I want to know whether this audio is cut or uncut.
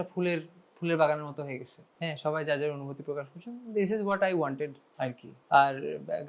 uncut